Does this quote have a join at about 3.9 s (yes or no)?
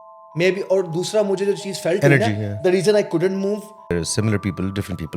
yes